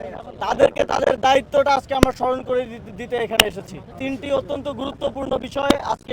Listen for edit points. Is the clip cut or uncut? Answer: cut